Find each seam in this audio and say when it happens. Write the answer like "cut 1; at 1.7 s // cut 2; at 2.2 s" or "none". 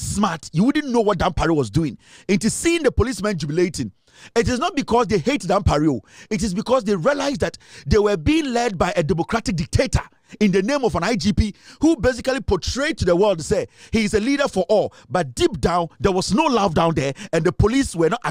none